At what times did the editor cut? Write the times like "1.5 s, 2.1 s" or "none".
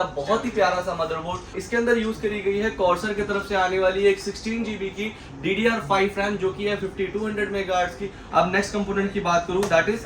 1.6 s, 8.2 s